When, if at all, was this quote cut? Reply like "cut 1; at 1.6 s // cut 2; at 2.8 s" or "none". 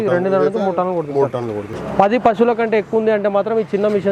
cut 1; at 1.7 s

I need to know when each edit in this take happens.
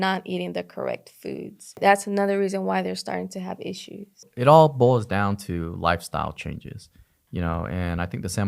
cut 1; at 1.8 s // cut 2; at 4.3 s

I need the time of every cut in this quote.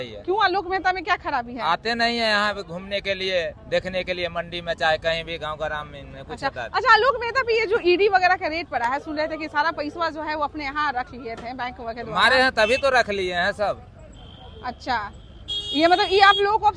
none

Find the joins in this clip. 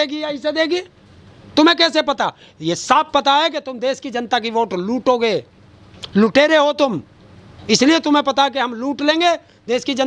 none

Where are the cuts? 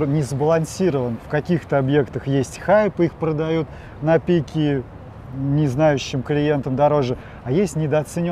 none

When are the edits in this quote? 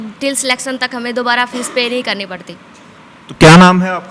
none

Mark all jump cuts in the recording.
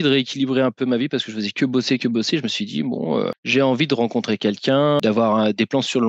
none

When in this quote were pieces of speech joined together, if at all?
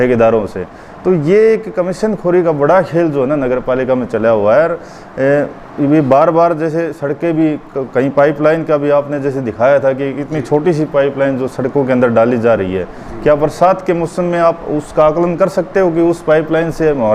none

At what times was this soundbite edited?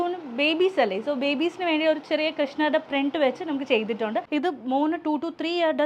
cut 1; at 4.3 s

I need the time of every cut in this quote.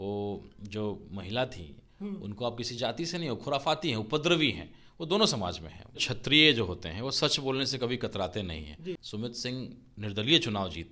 cut 1; at 6.0 s // cut 2; at 9.1 s

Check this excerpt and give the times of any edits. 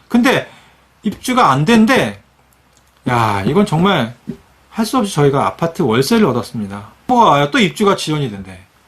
cut 1; at 7.1 s

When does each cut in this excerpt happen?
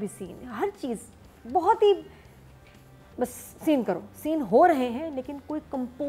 none

